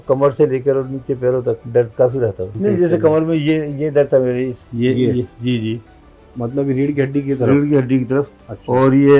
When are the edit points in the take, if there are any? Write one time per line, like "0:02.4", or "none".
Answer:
0:01.6
0:02.5
0:04.6

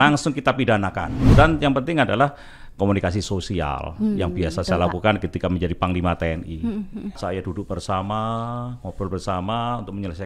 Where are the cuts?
0:01.1
0:07.2

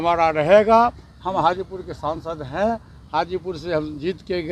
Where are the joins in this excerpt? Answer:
none

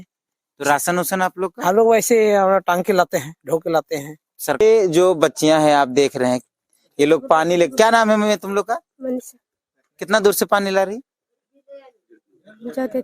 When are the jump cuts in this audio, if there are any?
0:04.6

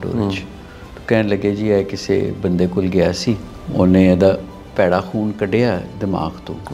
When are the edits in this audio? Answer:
0:03.6

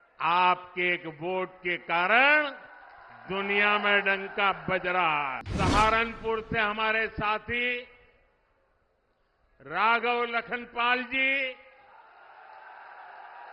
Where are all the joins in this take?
0:05.4

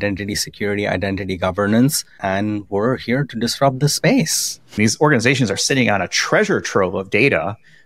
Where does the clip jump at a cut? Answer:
0:02.1
0:04.8

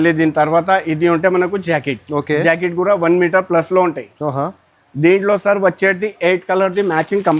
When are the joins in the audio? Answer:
none

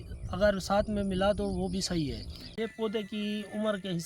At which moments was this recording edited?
0:02.5

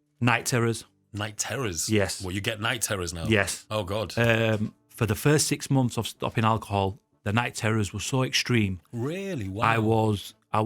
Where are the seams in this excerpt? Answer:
none

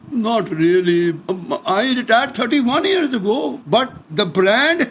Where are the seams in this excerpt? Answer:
0:01.2
0:03.6

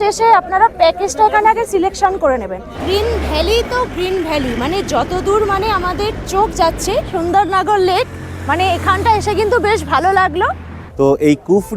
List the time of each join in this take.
0:02.8
0:07.1
0:10.8

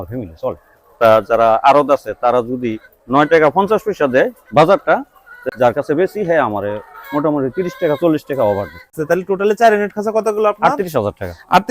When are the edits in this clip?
0:01.0
0:05.3
0:09.0

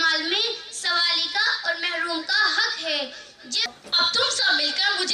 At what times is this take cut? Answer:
0:03.6

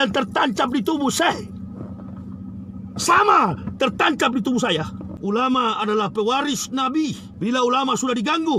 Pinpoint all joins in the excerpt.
0:05.0
0:07.3

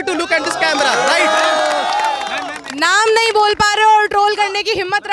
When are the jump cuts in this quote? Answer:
none

